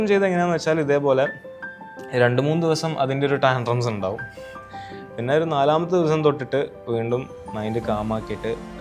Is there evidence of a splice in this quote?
no; 0 cuts

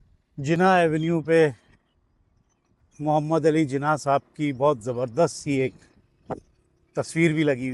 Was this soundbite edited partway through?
no; 0 cuts

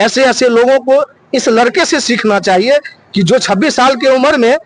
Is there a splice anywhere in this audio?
no; 0 cuts

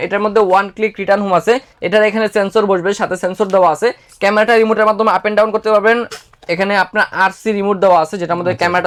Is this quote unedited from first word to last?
yes; 0 cuts

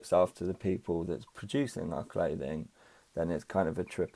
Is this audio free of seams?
yes; 0 cuts

